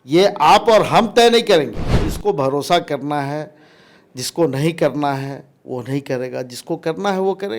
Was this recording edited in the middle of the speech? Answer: yes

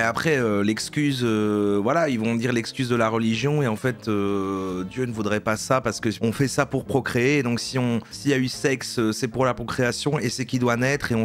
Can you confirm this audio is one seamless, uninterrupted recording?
yes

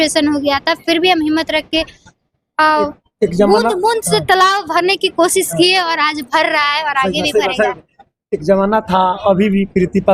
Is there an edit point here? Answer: no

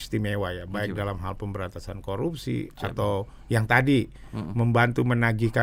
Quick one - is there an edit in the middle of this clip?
no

